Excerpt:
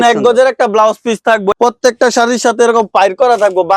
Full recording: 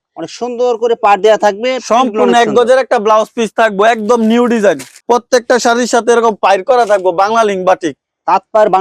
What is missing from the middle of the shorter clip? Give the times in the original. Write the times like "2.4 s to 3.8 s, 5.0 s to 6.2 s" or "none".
3.8 s to 5.0 s

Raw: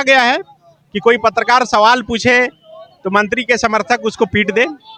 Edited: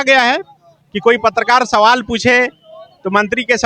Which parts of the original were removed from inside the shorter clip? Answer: none

